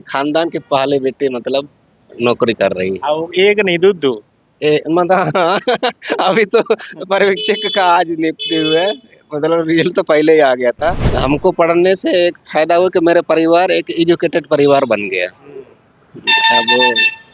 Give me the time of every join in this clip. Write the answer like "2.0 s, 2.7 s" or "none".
11.1 s